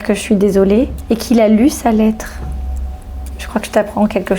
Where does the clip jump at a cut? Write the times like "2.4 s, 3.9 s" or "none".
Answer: 1.0 s